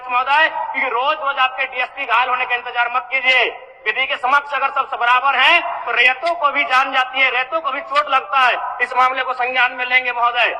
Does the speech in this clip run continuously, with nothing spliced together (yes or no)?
yes